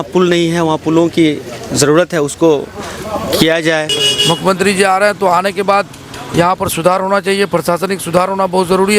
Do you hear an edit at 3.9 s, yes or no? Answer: yes